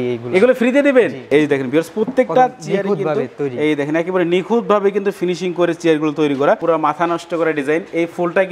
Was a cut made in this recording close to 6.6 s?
yes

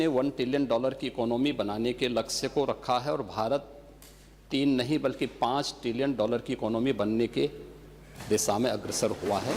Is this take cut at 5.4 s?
no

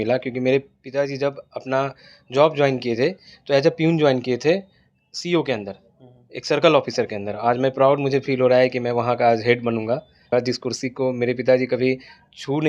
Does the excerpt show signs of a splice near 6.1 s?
no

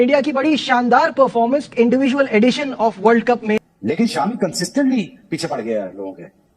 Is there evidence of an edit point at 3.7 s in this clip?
yes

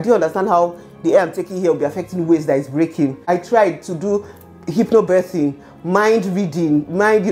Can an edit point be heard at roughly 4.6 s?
no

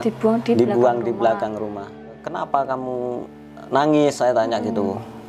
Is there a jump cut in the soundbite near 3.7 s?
no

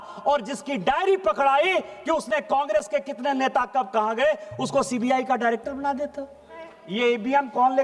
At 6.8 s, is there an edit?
yes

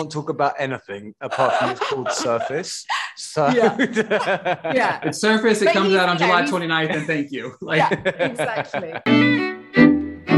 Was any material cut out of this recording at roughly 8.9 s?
yes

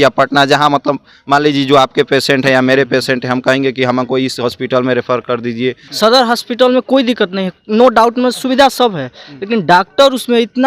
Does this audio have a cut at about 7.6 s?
no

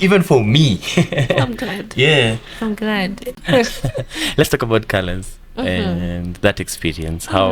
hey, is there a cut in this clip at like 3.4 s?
yes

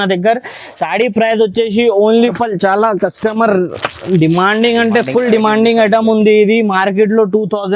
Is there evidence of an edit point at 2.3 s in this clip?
yes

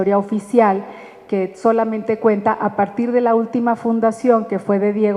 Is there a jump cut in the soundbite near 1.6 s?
no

